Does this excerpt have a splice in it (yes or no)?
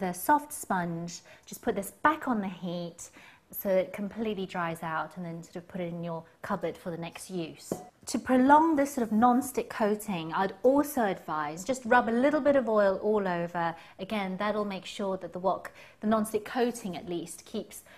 yes